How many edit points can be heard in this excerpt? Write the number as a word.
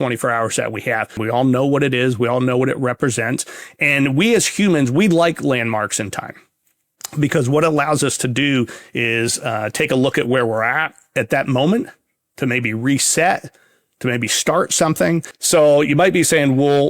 two